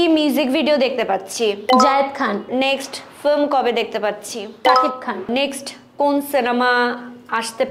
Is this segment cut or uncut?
cut